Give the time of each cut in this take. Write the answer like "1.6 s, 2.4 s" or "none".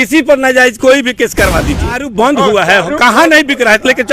2.0 s